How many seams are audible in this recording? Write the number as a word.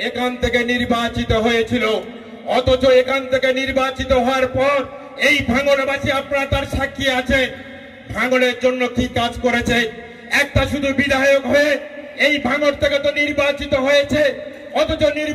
zero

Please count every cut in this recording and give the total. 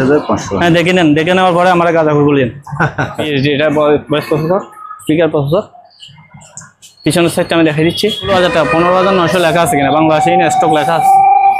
two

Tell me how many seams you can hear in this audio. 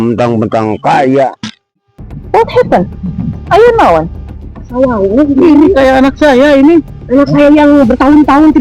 one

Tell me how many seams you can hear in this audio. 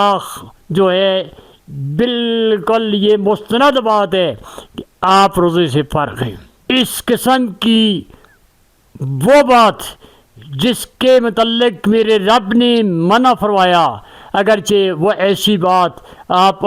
one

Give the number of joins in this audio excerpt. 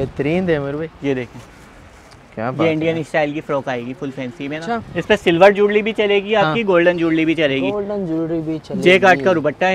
two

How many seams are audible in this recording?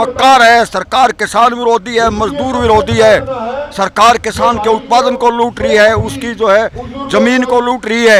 zero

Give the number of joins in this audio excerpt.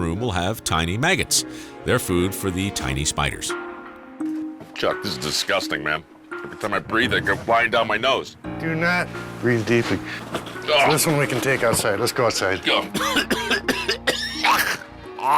one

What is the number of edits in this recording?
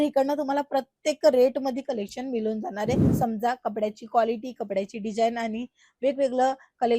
one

